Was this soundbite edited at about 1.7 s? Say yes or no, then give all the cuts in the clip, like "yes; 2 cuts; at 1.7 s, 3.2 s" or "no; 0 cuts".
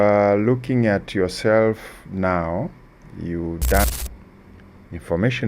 no; 1 cut; at 3.9 s